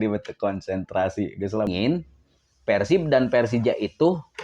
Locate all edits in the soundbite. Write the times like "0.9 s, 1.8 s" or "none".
1.7 s